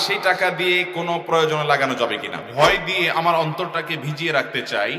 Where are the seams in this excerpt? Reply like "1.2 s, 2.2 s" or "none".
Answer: 2.4 s